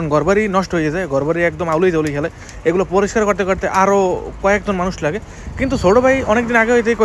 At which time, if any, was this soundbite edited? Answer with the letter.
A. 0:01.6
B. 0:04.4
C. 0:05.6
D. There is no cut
D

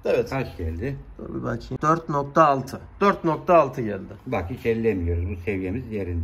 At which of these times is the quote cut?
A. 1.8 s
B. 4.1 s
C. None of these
A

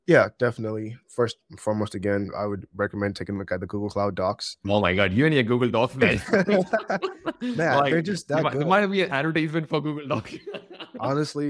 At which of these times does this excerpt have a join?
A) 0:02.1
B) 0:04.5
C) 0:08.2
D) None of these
B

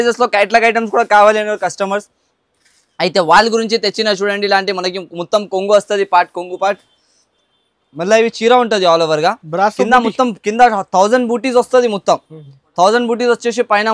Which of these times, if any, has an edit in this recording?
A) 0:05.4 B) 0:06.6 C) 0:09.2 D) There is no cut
D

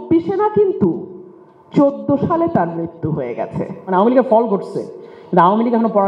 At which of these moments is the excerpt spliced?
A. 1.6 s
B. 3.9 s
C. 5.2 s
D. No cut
B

